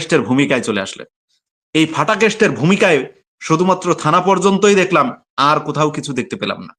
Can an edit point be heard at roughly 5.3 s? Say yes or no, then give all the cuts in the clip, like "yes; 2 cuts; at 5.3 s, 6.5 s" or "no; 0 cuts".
no; 0 cuts